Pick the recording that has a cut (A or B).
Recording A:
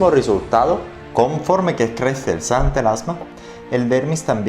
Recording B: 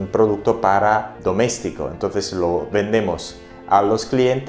A